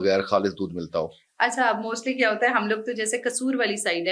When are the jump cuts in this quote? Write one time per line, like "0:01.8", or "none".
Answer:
none

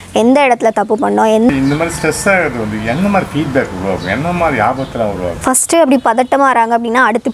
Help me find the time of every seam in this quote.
0:01.5
0:05.4

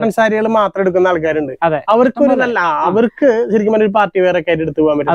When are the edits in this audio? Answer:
none

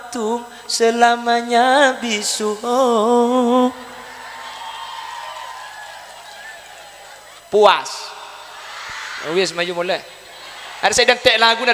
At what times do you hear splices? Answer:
0:07.4

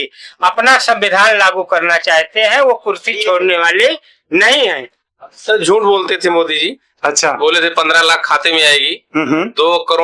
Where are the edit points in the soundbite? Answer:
0:04.9

